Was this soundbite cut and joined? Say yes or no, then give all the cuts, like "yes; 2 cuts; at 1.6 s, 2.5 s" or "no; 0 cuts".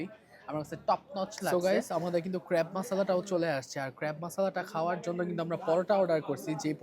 yes; 1 cut; at 1.5 s